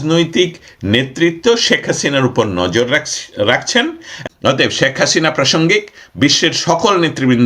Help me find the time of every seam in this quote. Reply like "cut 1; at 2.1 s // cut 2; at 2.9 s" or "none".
cut 1; at 4.1 s